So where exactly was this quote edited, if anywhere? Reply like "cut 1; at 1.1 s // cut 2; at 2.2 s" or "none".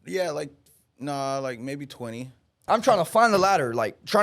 cut 1; at 2.6 s